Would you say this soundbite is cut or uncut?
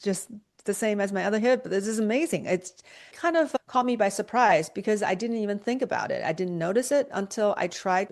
uncut